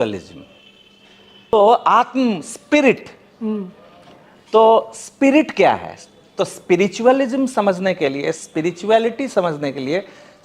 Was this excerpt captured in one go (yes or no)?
no